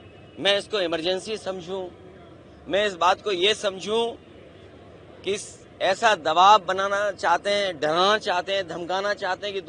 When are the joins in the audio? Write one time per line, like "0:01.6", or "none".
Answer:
none